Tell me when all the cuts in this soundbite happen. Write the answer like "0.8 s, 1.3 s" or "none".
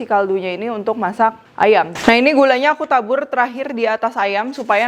1.9 s